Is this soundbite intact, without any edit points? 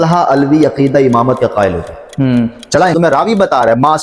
no; 1 cut; at 2.9 s

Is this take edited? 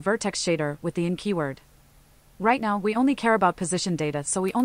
no; 0 cuts

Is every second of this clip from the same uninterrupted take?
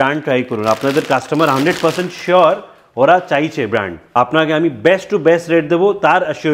no; 1 cut; at 4.0 s

